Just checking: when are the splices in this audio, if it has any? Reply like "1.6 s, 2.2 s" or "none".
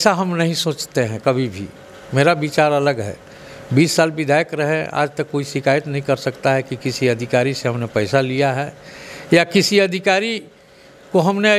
none